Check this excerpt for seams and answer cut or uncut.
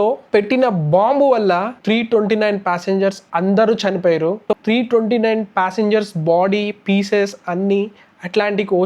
cut